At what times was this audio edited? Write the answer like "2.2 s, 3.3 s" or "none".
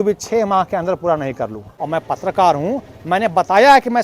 1.7 s